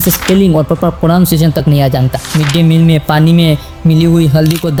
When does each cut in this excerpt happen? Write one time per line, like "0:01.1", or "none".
none

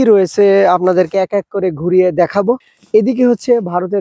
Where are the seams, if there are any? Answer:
0:02.7

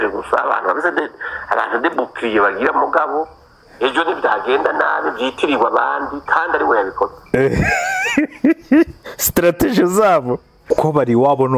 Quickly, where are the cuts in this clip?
0:10.5

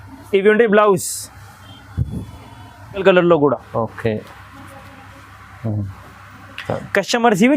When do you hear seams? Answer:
0:03.0

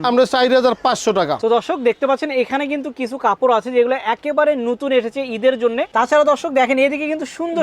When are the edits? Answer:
0:01.4
0:05.9

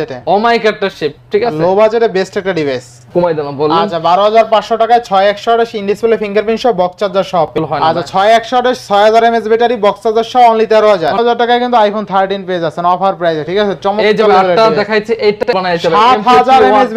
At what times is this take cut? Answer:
0:03.1
0:07.5
0:11.1
0:15.5

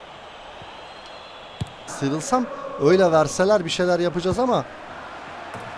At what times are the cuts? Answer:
0:01.9

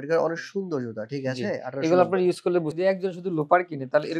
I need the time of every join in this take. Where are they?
0:02.8

